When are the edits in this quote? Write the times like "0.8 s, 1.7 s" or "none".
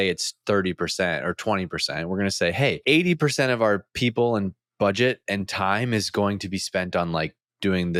none